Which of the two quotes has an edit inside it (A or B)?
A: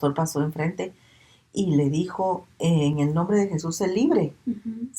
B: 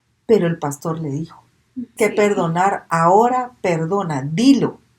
B